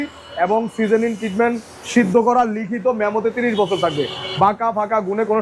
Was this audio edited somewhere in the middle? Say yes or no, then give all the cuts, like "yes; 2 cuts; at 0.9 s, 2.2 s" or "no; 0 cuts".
no; 0 cuts